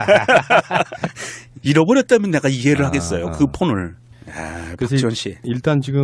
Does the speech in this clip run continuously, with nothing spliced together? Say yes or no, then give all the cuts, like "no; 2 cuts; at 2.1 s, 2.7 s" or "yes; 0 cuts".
no; 1 cut; at 2.2 s